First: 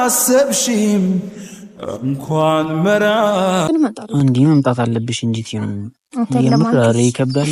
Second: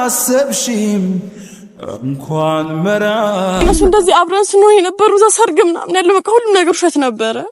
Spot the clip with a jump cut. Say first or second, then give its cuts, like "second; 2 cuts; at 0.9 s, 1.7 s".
second; 1 cut; at 3.6 s